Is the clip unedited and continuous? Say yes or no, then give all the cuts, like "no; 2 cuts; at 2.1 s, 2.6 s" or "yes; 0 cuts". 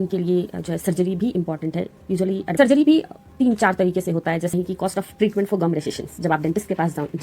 no; 2 cuts; at 2.5 s, 4.5 s